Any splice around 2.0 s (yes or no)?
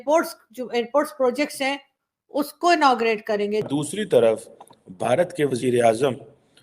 no